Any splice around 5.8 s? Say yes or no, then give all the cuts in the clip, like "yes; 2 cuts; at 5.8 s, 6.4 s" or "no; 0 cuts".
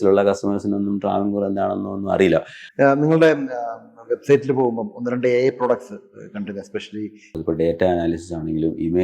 no; 2 cuts; at 2.6 s, 7.3 s